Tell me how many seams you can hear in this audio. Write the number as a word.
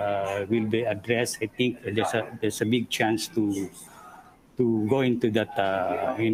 zero